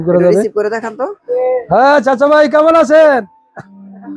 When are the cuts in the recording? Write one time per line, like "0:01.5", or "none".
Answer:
0:01.4